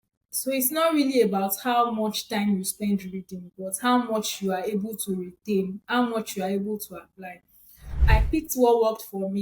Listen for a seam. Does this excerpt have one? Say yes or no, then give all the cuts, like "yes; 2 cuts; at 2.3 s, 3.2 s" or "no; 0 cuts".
yes; 1 cut; at 8.1 s